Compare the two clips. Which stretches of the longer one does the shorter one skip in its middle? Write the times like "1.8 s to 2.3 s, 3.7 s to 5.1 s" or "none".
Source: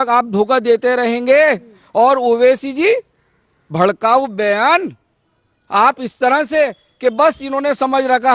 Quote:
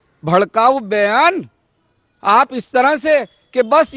none